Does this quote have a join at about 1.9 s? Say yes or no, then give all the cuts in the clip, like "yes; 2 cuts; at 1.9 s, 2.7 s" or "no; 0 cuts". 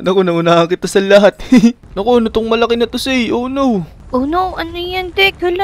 yes; 1 cut; at 1.9 s